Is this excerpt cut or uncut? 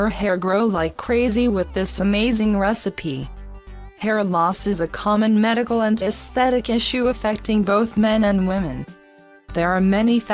uncut